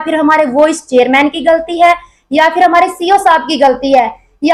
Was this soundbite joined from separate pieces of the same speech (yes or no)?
no